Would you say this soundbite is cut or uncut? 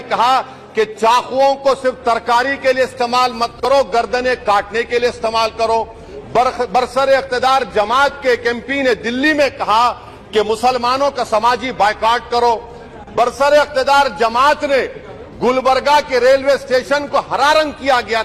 uncut